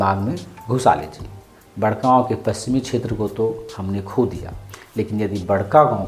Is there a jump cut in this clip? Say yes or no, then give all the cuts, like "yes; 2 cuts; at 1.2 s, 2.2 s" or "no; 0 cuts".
no; 0 cuts